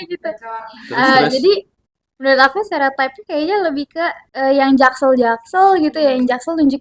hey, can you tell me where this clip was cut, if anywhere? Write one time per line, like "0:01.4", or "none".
0:04.2